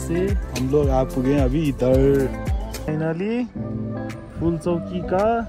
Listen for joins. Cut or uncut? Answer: cut